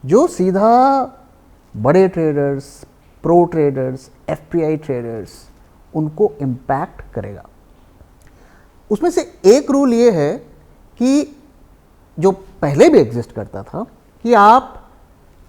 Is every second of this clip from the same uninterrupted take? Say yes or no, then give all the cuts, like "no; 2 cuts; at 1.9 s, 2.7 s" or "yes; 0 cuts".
yes; 0 cuts